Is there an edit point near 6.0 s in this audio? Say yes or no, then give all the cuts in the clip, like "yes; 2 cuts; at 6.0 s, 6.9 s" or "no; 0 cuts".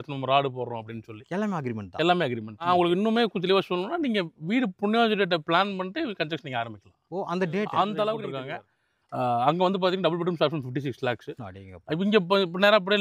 no; 2 cuts; at 2.7 s, 8.3 s